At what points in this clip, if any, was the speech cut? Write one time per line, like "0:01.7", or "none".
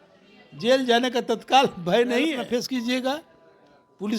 0:02.7